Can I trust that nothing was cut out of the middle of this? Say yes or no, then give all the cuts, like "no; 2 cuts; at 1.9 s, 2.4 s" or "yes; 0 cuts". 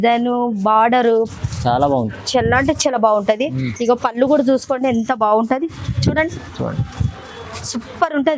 yes; 0 cuts